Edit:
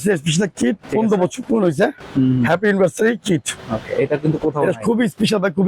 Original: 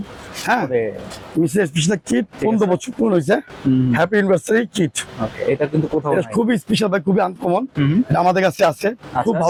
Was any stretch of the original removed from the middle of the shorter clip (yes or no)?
no